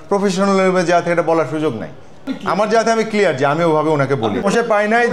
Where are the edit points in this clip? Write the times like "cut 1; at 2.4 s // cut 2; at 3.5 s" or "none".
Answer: none

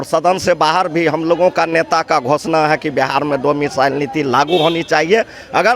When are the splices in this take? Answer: none

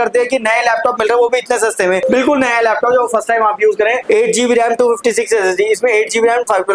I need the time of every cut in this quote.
cut 1; at 2.0 s // cut 2; at 4.0 s

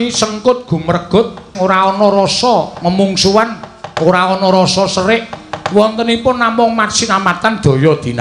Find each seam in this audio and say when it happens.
cut 1; at 1.5 s

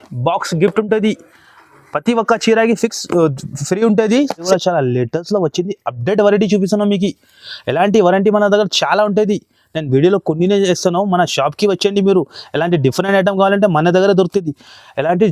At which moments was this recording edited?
cut 1; at 4.5 s

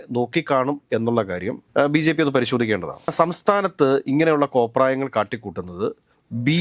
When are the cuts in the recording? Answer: cut 1; at 3.1 s

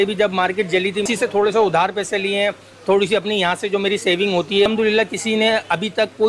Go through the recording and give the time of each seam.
cut 1; at 1.0 s // cut 2; at 4.7 s

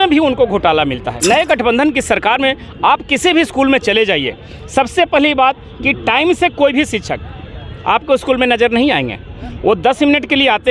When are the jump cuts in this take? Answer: cut 1; at 1.1 s

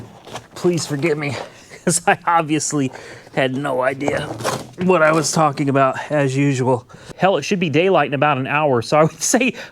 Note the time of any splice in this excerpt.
cut 1; at 7.1 s

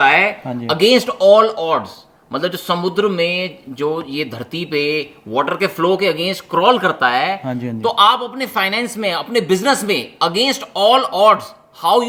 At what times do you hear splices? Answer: none

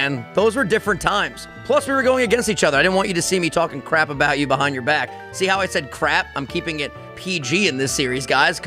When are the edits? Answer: none

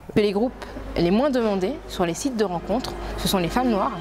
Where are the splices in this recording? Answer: none

